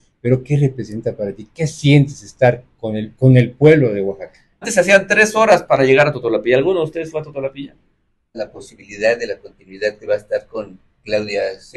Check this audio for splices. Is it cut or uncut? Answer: cut